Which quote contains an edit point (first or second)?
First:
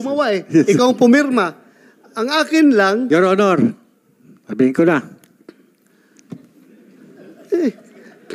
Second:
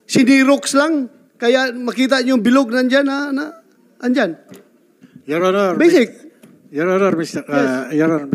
first